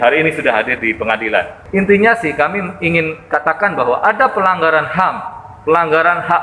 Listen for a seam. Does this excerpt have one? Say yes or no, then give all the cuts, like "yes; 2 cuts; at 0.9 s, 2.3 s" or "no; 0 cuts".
yes; 1 cut; at 1.6 s